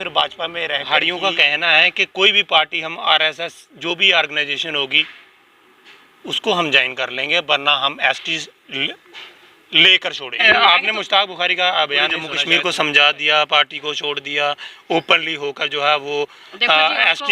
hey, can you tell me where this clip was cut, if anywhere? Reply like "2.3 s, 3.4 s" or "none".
0.9 s, 10.4 s, 12.3 s